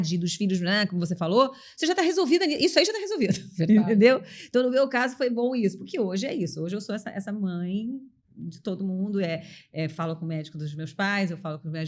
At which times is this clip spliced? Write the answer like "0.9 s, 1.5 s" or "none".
none

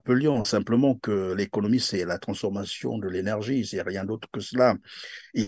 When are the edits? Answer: none

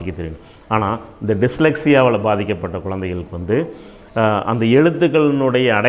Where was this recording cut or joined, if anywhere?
none

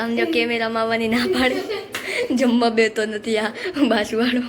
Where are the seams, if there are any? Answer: none

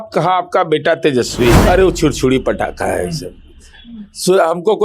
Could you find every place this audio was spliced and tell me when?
1.6 s

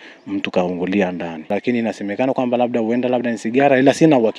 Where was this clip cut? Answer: 1.5 s

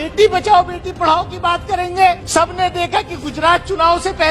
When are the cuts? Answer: 2.2 s

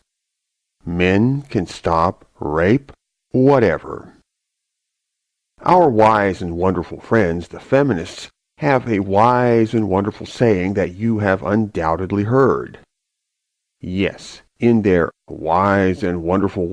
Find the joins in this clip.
7.7 s

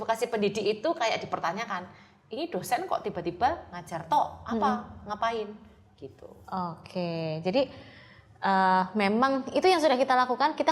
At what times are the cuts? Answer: none

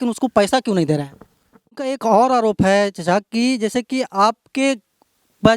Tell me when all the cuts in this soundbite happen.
2.0 s

